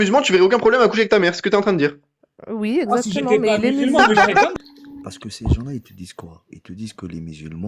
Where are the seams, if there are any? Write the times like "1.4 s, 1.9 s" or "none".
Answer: 4.5 s